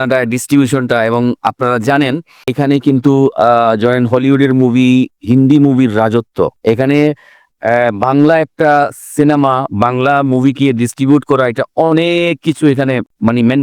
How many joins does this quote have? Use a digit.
1